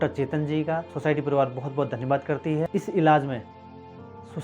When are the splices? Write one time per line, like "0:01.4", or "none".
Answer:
0:00.9
0:02.7